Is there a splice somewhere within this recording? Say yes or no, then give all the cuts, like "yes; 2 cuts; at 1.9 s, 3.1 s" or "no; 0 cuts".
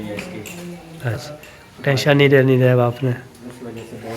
yes; 1 cut; at 1.3 s